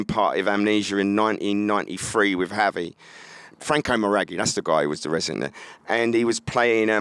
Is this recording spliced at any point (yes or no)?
yes